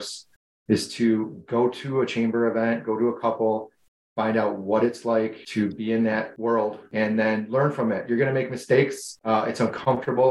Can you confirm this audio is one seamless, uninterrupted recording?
no; 3 cuts; at 5.4 s, 6.8 s, 9.1 s

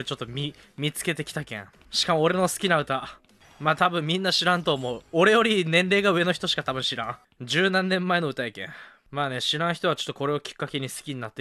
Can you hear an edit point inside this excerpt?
no; 0 cuts

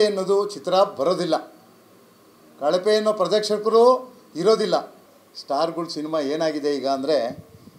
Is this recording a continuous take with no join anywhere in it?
no; 1 cut; at 5.0 s

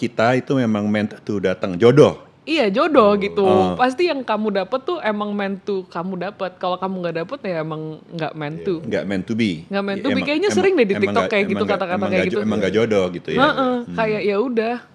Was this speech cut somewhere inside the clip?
no; 0 cuts

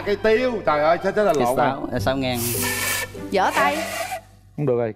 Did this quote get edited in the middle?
no; 0 cuts

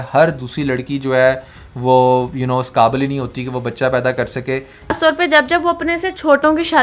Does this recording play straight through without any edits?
no; 1 cut; at 4.9 s

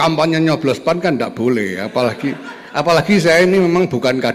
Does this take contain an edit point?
no; 0 cuts

